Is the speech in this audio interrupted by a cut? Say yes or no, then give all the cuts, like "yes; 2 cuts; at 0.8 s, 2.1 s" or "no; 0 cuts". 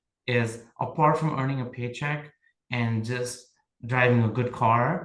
no; 0 cuts